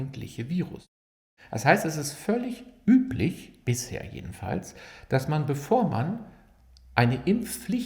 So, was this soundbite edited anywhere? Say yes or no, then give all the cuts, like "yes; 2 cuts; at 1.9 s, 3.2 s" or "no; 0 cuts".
yes; 1 cut; at 0.9 s